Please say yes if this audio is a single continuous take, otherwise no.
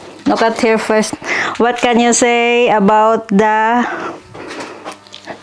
yes